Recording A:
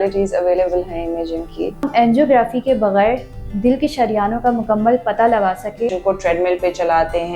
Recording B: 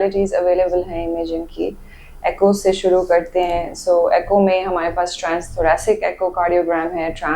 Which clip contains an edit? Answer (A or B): A